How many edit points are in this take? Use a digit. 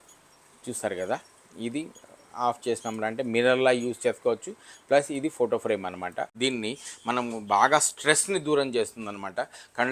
1